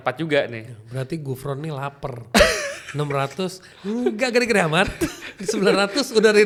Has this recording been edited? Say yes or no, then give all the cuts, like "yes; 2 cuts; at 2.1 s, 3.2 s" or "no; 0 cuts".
no; 0 cuts